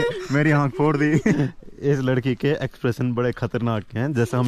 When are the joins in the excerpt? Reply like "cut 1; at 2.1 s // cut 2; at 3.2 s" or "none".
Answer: cut 1; at 1.4 s